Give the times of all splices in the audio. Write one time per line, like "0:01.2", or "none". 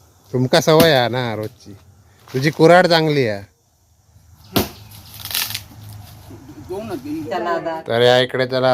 0:07.3